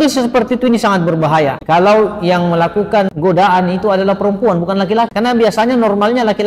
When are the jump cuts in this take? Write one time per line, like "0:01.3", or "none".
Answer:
0:01.6
0:03.1
0:05.1